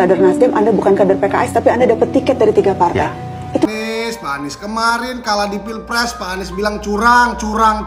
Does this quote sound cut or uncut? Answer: cut